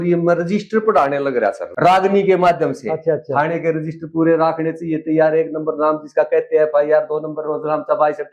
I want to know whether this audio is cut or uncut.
cut